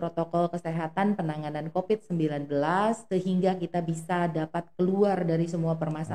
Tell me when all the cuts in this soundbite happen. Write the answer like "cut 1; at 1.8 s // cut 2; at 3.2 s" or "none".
cut 1; at 3.0 s